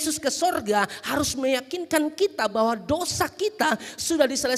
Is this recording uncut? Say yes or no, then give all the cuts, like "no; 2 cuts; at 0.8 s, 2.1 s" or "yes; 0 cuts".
yes; 0 cuts